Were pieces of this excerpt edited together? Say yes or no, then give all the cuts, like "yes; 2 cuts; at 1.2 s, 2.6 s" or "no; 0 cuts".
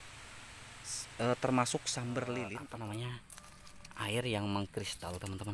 yes; 1 cut; at 2.5 s